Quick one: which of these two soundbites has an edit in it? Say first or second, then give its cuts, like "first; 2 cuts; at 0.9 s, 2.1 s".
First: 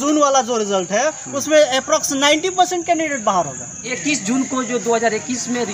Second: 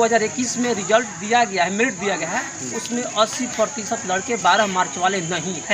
first; 1 cut; at 4.0 s